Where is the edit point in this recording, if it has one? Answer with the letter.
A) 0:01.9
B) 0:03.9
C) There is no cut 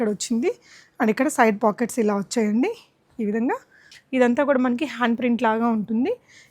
B